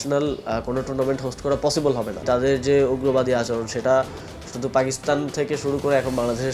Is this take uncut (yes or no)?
no